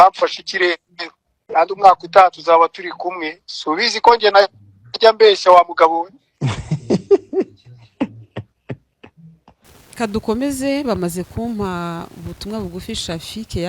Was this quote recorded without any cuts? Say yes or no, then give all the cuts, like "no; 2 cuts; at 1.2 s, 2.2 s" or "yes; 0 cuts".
no; 1 cut; at 9.6 s